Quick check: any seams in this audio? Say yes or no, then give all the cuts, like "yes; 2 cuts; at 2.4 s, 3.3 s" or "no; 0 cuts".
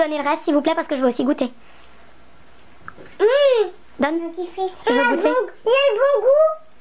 yes; 1 cut; at 1.0 s